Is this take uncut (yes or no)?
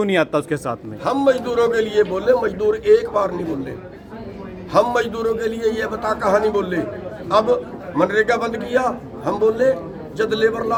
yes